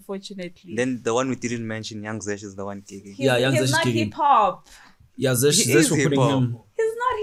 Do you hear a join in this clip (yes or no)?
no